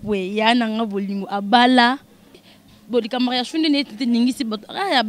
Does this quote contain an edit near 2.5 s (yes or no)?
yes